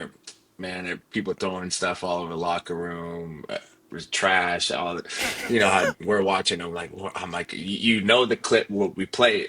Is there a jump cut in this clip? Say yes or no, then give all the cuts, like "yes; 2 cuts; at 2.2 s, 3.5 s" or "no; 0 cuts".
yes; 1 cut; at 5.9 s